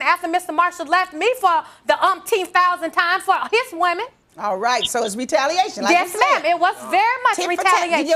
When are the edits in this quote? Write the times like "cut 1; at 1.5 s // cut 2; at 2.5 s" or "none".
none